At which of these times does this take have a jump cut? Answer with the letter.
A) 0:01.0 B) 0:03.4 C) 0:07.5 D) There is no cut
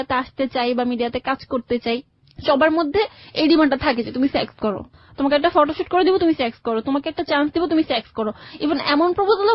D